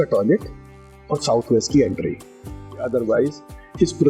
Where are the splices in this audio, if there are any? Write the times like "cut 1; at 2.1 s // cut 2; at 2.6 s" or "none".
cut 1; at 2.9 s